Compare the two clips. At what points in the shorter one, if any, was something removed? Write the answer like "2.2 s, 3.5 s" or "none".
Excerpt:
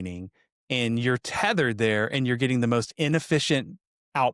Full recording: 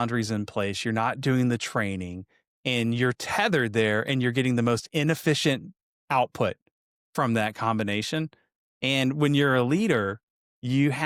none